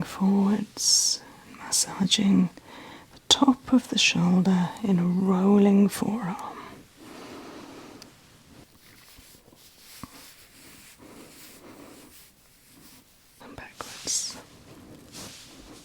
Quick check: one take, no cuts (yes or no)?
no